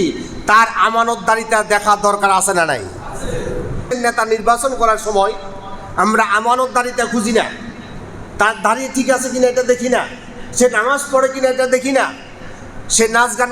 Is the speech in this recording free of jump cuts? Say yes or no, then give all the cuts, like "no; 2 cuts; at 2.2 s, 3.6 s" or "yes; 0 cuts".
no; 1 cut; at 3.8 s